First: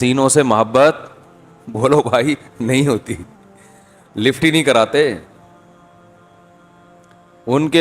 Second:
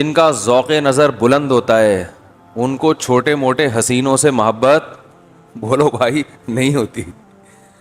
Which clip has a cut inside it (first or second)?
first